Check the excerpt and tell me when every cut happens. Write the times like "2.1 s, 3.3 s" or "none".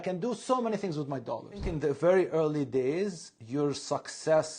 1.7 s